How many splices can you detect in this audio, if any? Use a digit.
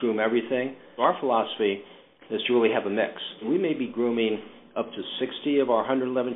2